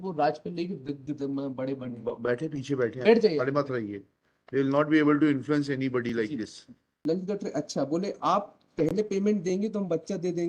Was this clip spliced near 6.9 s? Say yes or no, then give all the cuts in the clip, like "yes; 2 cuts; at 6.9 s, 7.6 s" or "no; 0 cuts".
yes; 1 cut; at 6.9 s